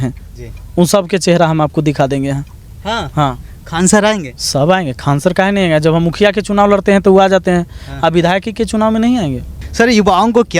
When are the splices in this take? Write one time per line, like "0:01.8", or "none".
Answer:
none